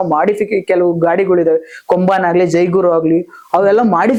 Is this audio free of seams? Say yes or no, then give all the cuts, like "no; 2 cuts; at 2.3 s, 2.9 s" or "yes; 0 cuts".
yes; 0 cuts